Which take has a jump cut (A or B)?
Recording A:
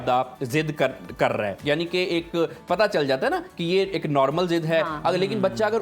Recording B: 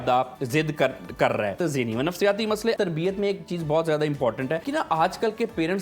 B